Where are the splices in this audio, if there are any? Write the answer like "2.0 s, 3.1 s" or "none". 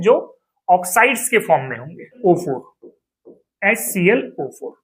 2.2 s